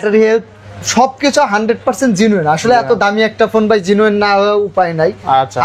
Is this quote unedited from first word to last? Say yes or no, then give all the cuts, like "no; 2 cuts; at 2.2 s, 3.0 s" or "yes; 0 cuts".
yes; 0 cuts